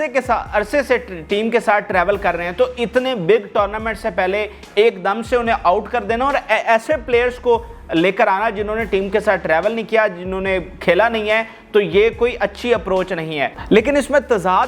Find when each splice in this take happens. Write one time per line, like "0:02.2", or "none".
0:13.6